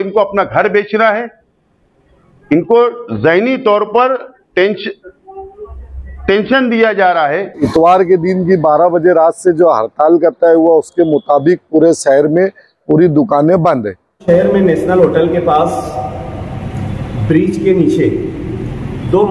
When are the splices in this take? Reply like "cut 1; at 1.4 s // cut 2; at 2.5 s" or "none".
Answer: cut 1; at 7.6 s // cut 2; at 14.2 s